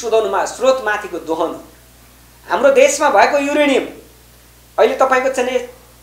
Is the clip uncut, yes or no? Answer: yes